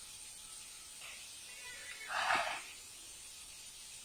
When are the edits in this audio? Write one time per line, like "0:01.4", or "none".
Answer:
0:01.0